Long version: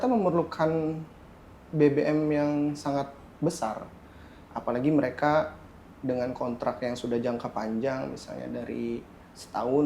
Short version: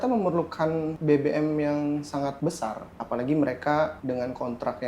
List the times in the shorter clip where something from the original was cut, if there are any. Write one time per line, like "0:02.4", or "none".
0:00.9
0:02.5
0:04.0